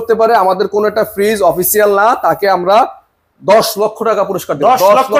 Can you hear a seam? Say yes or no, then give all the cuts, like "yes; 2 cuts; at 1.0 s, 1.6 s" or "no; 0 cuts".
no; 0 cuts